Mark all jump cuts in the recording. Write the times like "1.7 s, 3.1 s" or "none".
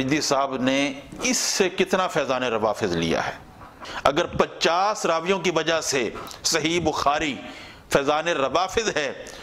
3.8 s